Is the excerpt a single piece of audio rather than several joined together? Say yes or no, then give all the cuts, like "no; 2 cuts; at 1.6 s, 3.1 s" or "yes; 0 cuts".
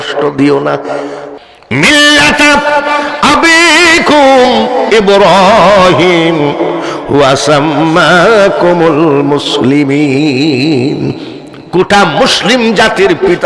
no; 1 cut; at 1.3 s